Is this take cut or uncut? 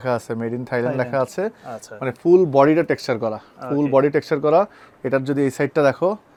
uncut